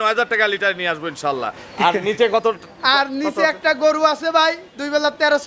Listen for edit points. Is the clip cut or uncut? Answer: uncut